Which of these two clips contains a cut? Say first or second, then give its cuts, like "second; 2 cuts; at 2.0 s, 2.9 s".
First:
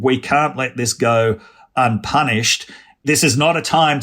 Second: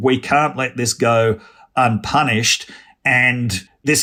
first; 1 cut; at 2.8 s